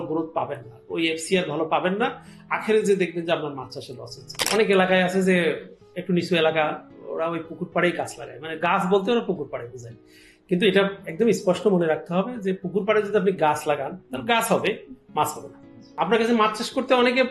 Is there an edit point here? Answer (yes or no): yes